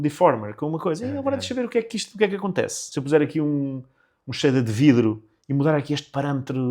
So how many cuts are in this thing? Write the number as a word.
one